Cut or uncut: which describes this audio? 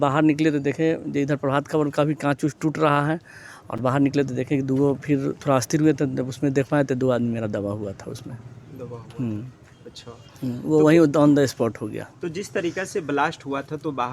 uncut